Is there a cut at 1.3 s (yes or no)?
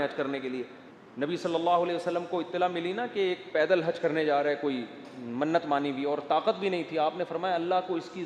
yes